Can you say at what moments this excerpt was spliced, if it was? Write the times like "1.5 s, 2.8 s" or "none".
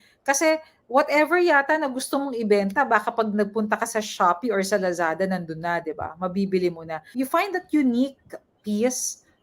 7.0 s